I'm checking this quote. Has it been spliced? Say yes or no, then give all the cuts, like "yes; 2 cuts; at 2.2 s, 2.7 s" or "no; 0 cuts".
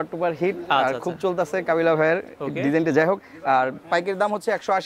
no; 0 cuts